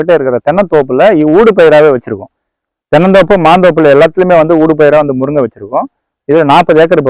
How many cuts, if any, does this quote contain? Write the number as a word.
zero